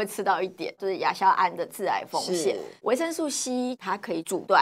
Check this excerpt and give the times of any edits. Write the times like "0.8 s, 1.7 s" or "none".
0.8 s, 1.7 s, 2.8 s, 3.8 s